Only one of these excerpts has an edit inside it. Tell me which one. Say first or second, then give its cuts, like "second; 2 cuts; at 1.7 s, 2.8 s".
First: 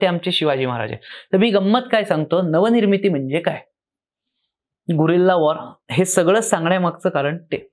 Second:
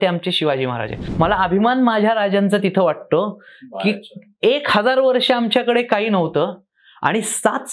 second; 1 cut; at 1.0 s